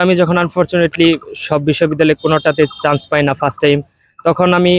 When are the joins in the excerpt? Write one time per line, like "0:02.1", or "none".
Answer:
none

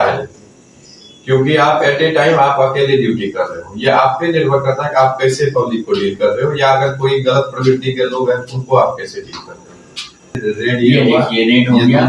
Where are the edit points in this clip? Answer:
0:10.4

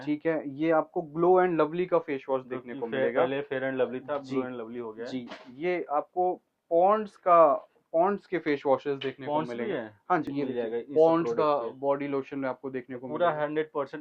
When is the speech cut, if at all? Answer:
0:10.3

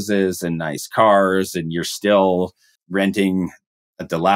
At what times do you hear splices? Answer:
0:02.7

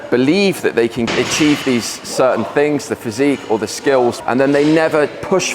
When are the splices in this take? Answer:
0:01.1

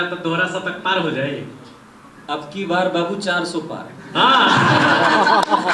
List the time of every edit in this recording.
none

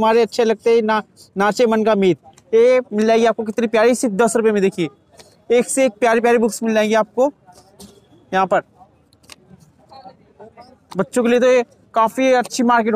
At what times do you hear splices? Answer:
none

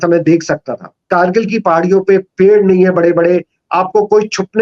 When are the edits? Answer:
0:01.0

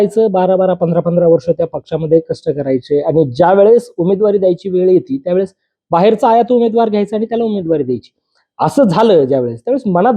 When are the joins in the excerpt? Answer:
none

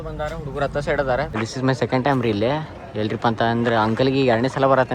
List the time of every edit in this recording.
0:01.3

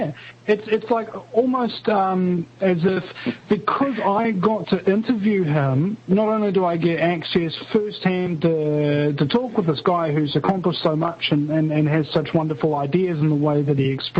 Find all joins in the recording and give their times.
0:12.4

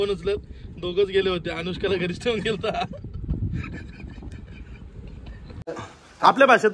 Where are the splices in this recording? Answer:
0:05.7

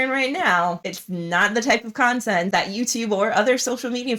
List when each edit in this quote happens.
none

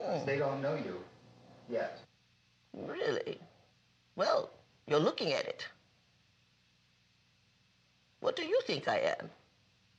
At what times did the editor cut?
0:01.0

